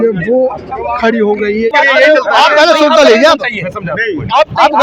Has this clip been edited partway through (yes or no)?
yes